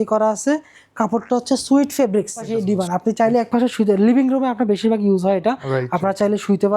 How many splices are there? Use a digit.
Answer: 1